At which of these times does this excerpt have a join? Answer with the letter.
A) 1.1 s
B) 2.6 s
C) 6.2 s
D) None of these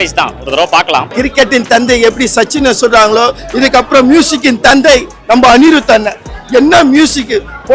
A